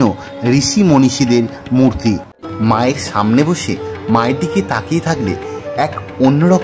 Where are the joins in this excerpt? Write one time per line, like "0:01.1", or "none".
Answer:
0:02.3